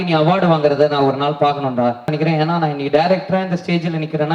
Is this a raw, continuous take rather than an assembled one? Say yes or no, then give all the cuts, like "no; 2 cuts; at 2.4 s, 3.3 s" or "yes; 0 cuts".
no; 1 cut; at 2.1 s